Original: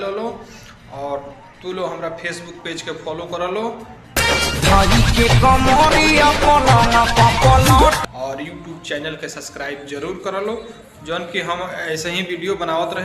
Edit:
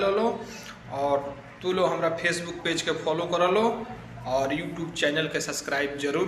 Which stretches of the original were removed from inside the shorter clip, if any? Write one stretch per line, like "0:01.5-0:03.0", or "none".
0:04.2-0:08.0